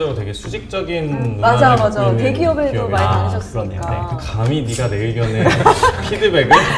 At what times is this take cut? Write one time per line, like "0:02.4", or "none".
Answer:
none